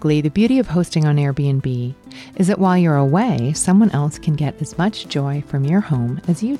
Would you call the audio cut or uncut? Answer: uncut